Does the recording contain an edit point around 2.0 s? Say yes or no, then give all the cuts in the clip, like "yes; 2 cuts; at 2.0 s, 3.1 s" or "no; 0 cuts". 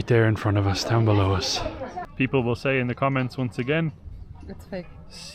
yes; 1 cut; at 2.0 s